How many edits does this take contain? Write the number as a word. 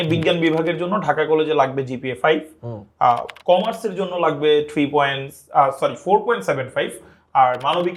zero